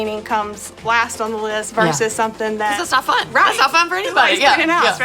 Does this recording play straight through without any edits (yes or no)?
no